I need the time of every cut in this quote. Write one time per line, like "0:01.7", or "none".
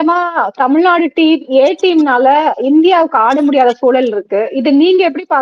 none

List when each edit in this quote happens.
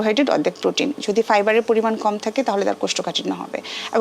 0:00.9

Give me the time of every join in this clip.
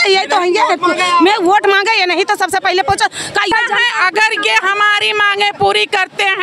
0:03.5

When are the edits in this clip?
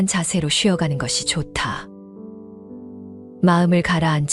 0:01.8
0:03.2

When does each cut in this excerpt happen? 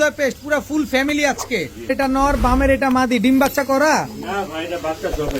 0:01.9

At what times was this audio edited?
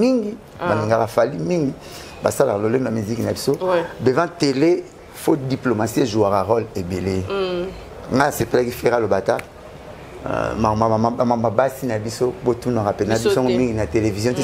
none

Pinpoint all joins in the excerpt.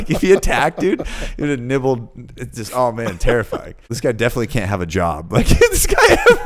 0:03.9

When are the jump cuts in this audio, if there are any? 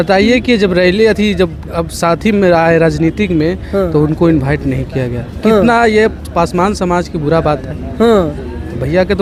none

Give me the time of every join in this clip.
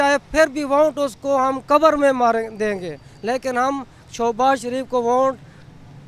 none

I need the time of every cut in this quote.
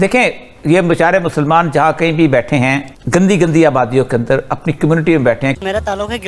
0:02.9
0:05.6

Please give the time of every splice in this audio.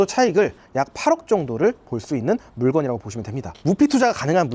0:03.5

